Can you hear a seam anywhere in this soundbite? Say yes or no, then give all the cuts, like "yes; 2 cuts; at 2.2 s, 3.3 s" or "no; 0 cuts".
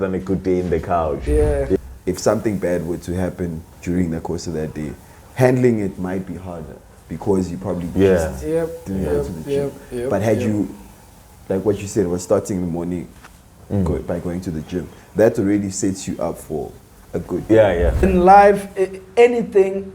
yes; 2 cuts; at 1.8 s, 18.0 s